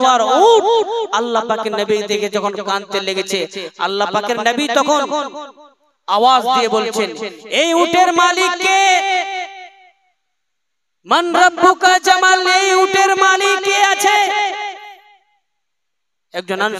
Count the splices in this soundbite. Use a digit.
0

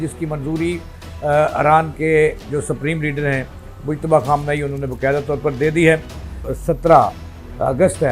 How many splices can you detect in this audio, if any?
1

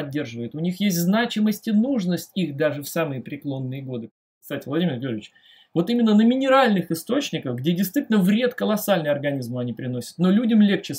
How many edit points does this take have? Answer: 1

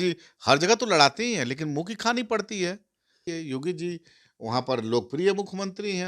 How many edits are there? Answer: 1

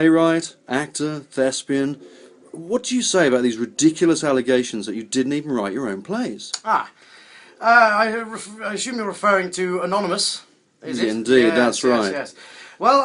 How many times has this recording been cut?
0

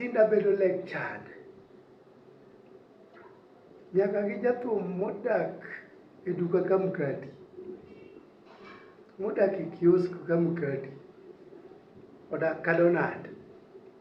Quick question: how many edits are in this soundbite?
0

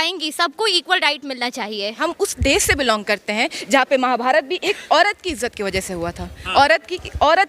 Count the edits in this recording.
1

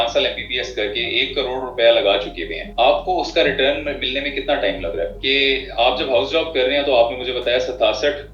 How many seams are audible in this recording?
0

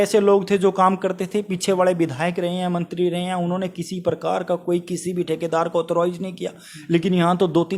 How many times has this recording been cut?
0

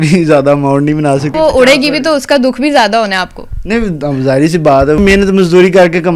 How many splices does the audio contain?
2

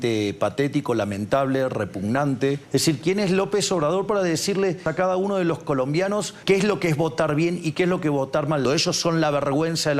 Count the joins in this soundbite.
4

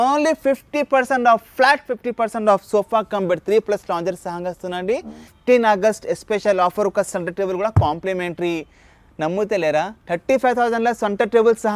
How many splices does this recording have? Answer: 1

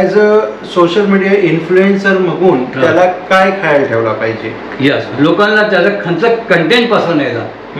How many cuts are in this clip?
1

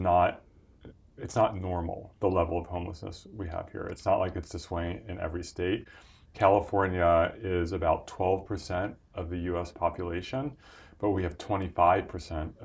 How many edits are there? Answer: 0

